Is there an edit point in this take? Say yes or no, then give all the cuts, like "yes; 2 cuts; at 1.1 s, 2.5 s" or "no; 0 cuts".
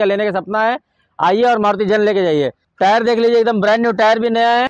yes; 1 cut; at 2.6 s